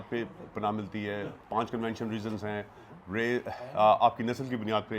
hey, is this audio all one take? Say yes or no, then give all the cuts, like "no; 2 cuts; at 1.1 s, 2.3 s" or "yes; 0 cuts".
no; 1 cut; at 1.4 s